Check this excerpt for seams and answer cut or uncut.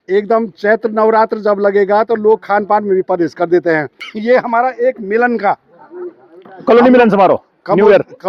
cut